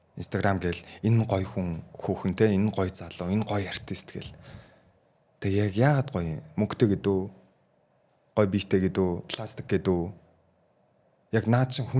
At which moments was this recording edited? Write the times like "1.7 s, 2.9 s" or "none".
none